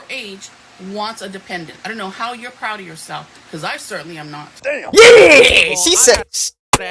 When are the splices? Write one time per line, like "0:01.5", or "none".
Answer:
none